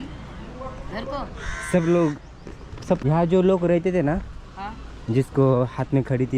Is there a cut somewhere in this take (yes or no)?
yes